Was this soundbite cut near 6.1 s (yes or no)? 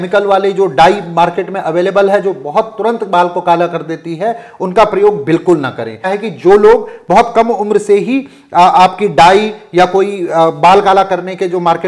yes